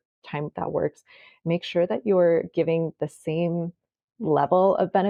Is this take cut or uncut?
uncut